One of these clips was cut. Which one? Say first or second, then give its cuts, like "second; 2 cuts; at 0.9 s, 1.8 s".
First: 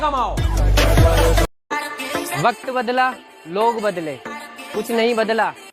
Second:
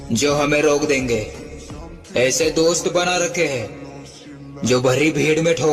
first; 1 cut; at 1.6 s